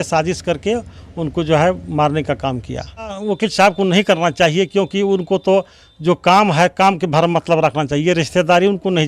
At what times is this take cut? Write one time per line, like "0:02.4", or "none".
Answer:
0:03.2